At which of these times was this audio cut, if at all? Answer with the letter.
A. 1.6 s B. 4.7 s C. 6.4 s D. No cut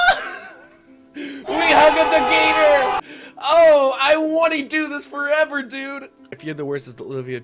C